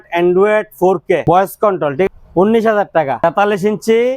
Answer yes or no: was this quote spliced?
yes